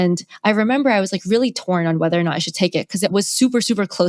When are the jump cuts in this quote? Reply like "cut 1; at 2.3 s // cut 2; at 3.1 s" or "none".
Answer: cut 1; at 3.1 s